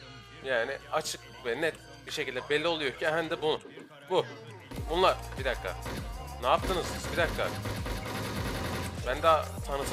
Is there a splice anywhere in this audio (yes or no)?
no